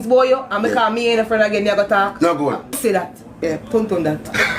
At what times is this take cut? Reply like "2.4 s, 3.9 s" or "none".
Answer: 2.8 s